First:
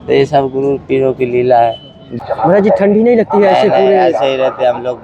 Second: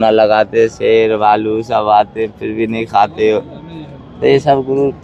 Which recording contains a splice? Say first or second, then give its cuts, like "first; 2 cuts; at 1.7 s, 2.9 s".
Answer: first; 1 cut; at 2.2 s